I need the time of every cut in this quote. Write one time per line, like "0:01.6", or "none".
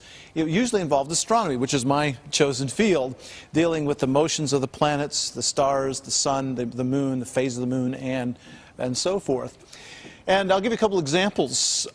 0:04.2